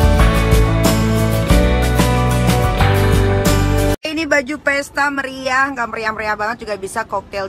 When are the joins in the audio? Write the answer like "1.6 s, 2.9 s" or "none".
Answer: none